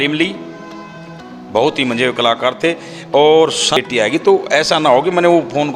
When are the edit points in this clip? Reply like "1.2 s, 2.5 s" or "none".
3.8 s